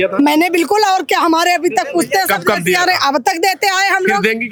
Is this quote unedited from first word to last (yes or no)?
yes